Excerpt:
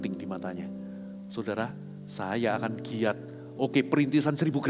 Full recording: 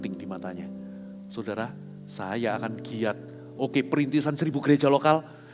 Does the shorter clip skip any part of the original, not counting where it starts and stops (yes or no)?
no